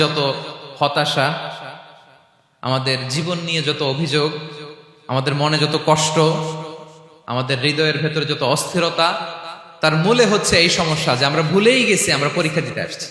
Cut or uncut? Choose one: uncut